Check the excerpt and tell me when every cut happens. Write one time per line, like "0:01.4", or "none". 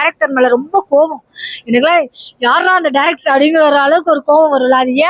none